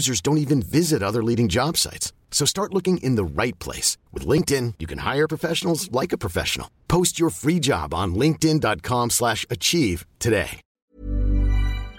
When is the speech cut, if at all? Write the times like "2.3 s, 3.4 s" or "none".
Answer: 10.8 s